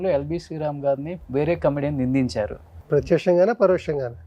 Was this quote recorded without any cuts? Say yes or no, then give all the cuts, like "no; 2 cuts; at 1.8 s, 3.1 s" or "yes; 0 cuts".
no; 2 cuts; at 1.1 s, 2.8 s